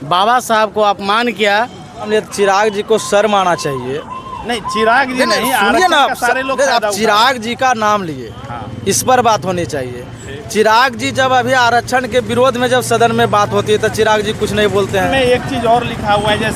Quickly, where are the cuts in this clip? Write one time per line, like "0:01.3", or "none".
0:02.1
0:15.1

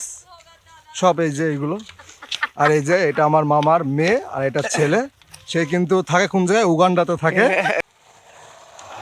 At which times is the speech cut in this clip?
0:07.8

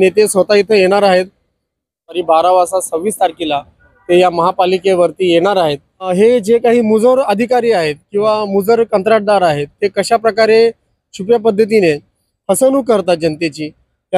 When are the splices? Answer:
0:02.2
0:06.1

